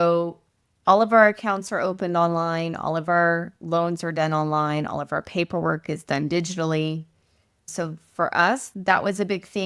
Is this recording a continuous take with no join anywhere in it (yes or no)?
no